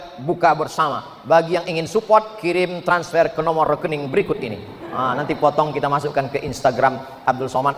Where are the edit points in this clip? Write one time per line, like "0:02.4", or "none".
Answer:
none